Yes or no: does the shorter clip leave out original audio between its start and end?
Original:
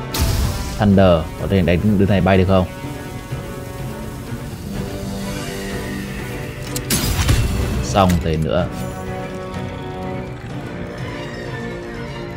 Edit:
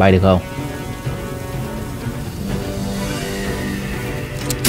no